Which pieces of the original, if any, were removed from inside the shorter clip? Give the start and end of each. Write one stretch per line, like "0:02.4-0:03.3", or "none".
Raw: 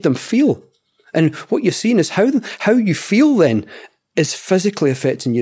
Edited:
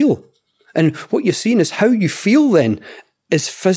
0:02.1-0:02.6